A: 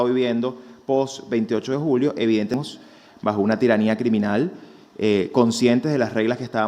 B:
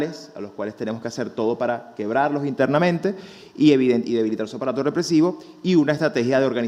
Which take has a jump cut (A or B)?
A